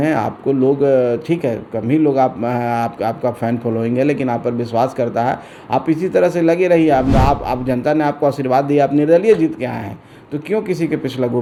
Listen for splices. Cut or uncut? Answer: uncut